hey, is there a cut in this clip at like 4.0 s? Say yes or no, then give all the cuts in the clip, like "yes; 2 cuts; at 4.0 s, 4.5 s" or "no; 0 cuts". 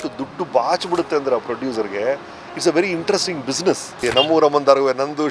yes; 1 cut; at 4.0 s